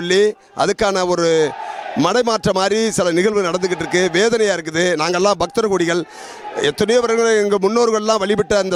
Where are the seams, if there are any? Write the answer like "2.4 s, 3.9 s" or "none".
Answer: none